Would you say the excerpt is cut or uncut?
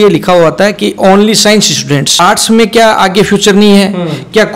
cut